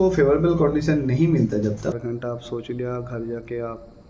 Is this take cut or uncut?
cut